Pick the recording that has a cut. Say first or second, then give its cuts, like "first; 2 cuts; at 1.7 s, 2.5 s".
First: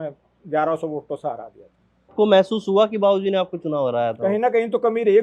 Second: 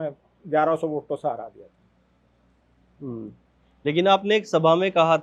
first; 1 cut; at 2.1 s